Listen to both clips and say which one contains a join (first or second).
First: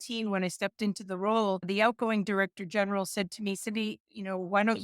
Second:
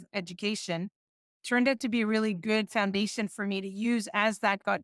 first